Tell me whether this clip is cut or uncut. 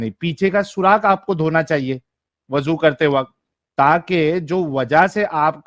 uncut